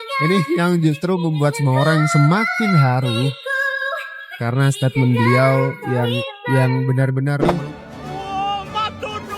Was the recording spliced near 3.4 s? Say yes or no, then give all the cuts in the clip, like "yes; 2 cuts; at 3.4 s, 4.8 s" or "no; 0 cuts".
no; 1 cut; at 7.5 s